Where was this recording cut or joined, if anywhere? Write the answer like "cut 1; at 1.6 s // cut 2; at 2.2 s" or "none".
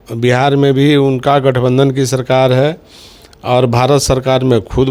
none